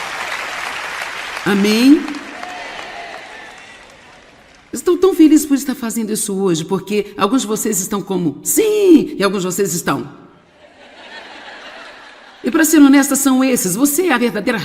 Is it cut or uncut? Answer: cut